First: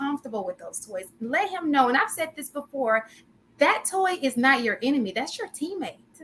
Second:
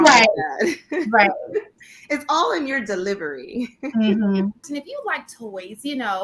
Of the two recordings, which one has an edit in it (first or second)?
second